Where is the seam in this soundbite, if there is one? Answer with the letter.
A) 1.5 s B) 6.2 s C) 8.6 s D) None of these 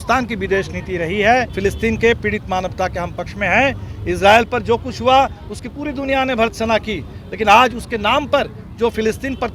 A